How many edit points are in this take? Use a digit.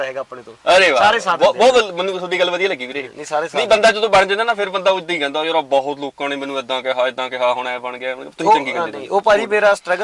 0